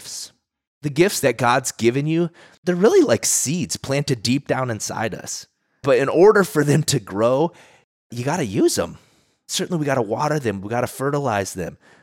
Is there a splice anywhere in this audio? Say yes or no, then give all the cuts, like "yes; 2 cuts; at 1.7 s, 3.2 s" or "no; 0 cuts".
yes; 2 cuts; at 1.0 s, 2.5 s